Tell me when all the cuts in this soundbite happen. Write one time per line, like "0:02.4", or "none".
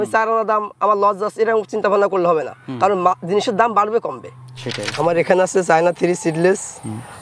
0:04.8

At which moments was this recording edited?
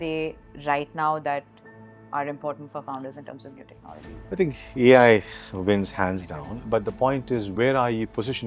0:07.5

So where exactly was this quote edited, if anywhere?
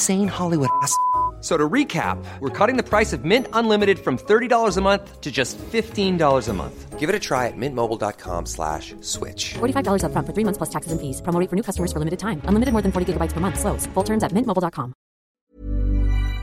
0:15.3

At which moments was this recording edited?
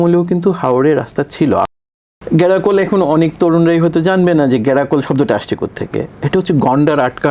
0:01.7

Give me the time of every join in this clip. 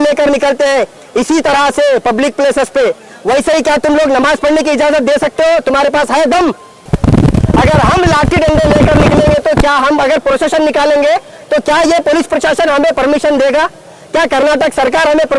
0:06.9

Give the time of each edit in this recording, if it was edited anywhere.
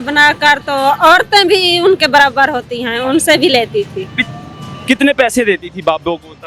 none

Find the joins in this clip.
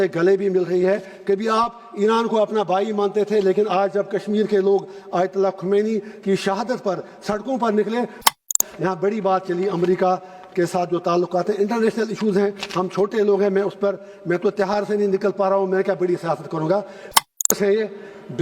0:08.4
0:17.1

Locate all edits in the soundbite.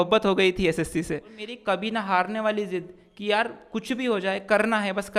0:01.5

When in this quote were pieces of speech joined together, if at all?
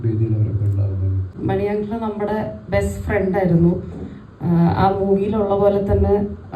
0:01.3

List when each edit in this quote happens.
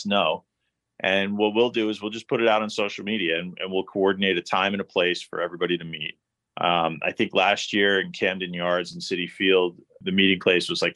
0:10.0

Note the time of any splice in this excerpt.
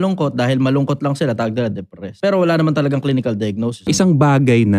0:02.1
0:03.9

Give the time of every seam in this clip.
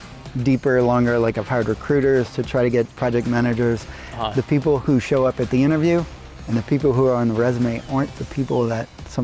none

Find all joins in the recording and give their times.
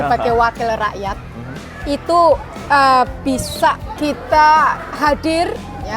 0:04.0

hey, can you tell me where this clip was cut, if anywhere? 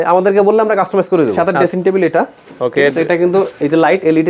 0:01.4

